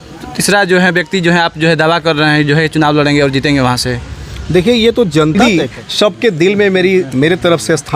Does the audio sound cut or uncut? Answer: cut